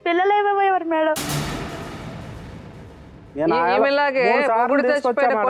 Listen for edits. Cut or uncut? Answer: cut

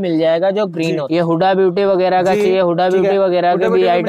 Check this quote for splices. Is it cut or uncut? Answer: cut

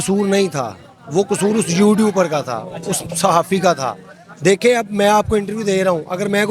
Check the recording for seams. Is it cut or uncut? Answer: uncut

